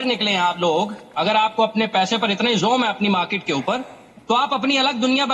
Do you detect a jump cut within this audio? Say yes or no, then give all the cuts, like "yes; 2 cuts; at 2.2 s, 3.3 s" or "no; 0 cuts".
yes; 1 cut; at 1.3 s